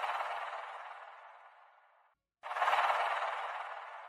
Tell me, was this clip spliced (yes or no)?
yes